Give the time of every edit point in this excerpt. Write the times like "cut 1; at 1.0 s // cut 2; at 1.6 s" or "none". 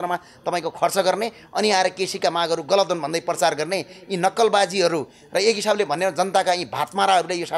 none